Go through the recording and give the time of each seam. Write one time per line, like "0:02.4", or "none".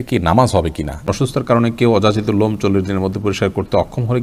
0:01.1